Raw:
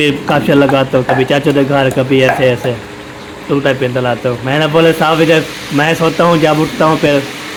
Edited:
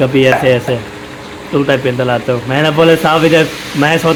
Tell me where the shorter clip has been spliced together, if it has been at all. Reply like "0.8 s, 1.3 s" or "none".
none

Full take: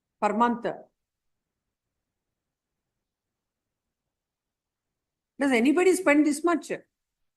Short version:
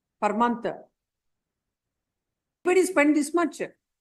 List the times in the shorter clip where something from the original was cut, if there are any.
2.6 s

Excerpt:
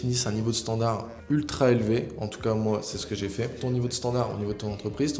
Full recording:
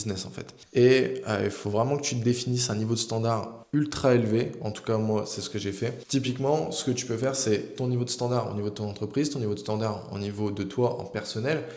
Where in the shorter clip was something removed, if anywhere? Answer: 3.6 s

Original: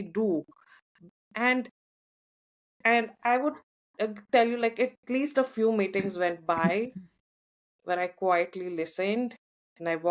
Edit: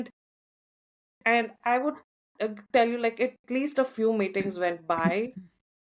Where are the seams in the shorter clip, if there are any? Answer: none

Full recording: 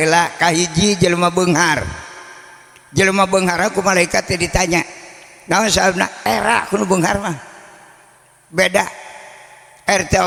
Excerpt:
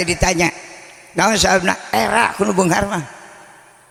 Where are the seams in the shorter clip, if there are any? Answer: none

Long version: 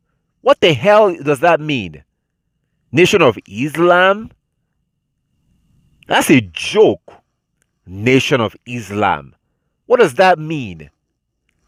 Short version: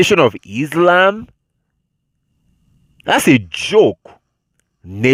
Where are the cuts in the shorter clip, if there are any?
none

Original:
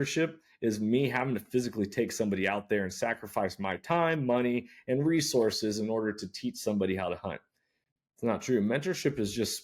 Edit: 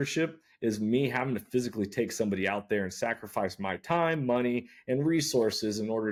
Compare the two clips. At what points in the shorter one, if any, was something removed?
none

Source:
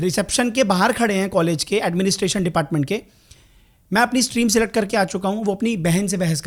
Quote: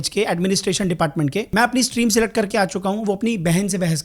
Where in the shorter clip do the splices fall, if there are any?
1.5 s

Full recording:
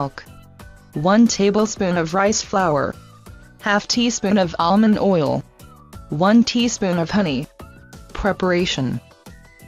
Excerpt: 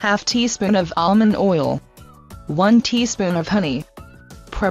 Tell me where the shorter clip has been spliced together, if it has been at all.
none

